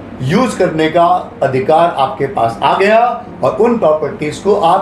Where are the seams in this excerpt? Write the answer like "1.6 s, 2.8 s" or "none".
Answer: none